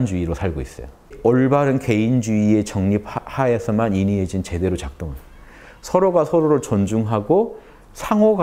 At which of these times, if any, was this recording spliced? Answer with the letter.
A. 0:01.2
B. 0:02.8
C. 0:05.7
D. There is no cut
A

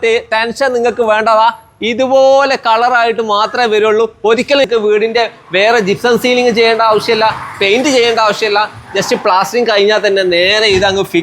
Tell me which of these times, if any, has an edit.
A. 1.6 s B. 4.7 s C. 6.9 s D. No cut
B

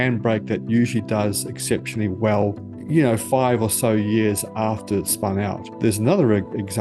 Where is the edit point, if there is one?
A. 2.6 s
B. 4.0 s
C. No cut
C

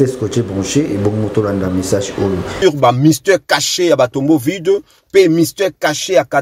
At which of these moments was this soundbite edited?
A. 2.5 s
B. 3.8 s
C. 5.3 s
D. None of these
A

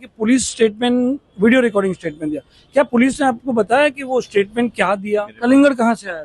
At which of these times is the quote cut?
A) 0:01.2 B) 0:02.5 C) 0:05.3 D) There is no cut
C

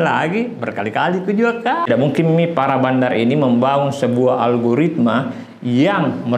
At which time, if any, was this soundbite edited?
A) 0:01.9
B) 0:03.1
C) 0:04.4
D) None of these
A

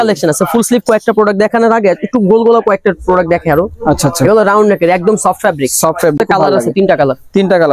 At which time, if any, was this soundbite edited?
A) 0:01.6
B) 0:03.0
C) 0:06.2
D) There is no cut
C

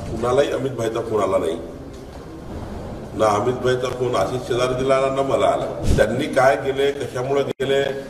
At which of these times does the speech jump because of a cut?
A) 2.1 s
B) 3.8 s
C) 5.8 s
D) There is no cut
C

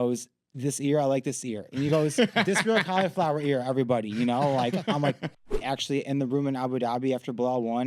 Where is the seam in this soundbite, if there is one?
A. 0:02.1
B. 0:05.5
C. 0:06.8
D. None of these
B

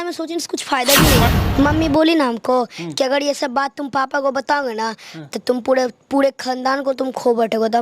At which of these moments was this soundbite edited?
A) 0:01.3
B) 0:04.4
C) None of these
A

